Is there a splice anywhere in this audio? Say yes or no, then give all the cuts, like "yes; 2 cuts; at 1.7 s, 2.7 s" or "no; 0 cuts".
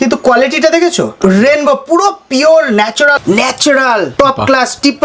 yes; 3 cuts; at 1.1 s, 3.2 s, 4.1 s